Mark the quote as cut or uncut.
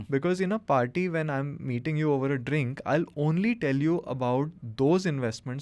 uncut